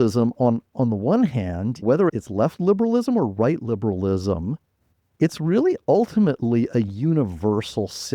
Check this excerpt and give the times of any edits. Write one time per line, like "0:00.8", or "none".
0:01.9